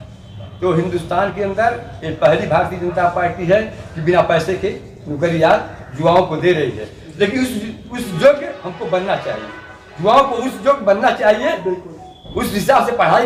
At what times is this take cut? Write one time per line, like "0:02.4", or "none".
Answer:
none